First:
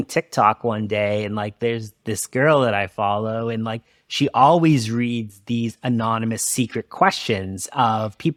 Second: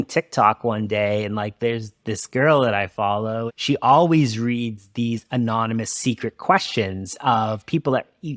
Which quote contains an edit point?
second; 1 cut; at 3.5 s

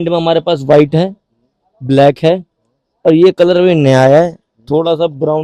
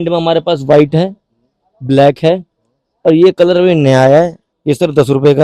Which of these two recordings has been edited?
second; 1 cut; at 4.5 s

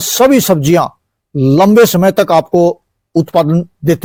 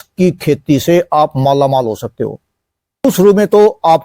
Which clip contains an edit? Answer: second; 1 cut; at 3.0 s

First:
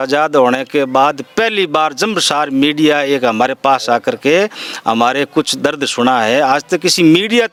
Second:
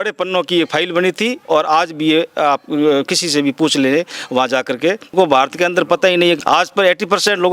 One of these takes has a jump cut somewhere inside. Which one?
second; 2 cuts; at 5.1 s, 6.4 s

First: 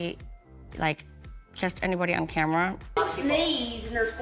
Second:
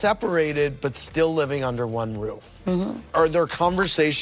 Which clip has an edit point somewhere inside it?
first; 1 cut; at 2.8 s

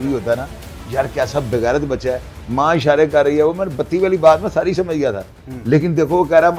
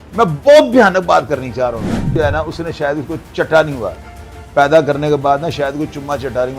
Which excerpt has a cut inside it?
second; 1 cut; at 2.2 s

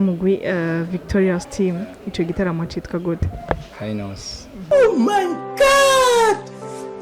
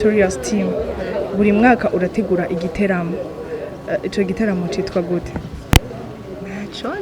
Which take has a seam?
first; 1 cut; at 4.6 s

